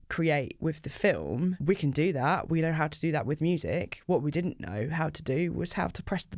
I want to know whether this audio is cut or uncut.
cut